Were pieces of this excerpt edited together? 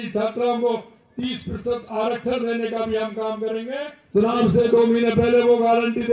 yes; 1 cut; at 4.0 s

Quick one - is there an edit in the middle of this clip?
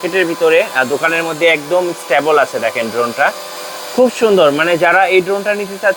no; 0 cuts

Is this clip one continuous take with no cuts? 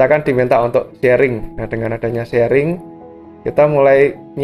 yes; 0 cuts

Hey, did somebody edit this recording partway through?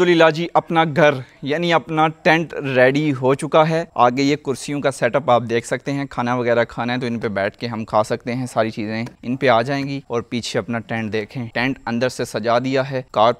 no; 0 cuts

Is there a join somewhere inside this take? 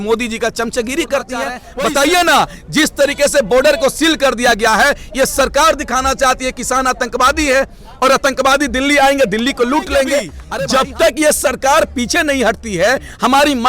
yes; 2 cuts; at 1.6 s, 10.4 s

